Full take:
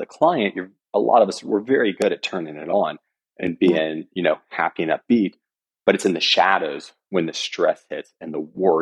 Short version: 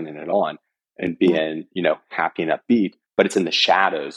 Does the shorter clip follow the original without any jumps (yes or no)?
no